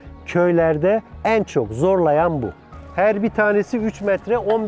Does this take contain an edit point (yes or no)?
yes